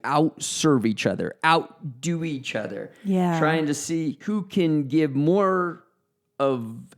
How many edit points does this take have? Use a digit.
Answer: 1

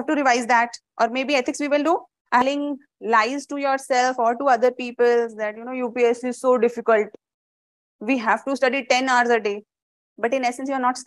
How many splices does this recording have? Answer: 1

